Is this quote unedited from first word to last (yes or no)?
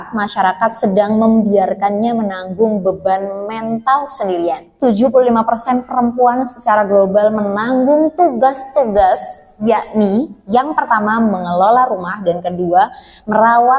no